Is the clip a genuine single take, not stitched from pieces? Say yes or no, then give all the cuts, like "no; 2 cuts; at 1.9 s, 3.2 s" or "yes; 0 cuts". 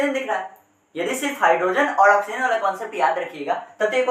yes; 0 cuts